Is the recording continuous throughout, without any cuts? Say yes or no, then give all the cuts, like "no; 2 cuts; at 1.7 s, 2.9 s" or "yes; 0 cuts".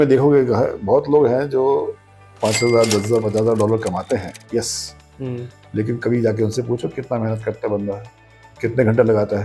yes; 0 cuts